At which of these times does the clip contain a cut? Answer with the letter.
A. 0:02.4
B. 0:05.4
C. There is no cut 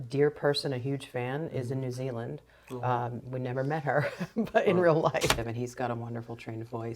B